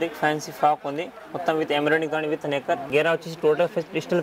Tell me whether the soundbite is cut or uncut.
cut